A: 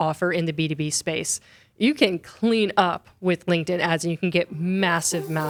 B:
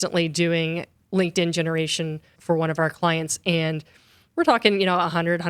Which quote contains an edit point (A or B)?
B